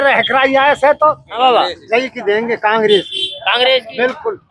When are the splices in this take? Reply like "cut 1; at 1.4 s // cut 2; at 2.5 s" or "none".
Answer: cut 1; at 1.3 s